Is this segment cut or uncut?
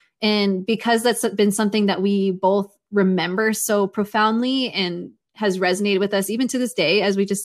uncut